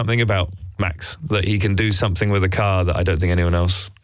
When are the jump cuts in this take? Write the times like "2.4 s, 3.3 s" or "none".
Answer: none